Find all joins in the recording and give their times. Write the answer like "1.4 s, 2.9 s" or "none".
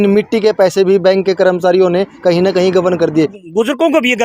3.1 s